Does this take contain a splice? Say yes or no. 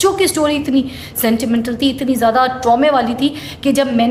no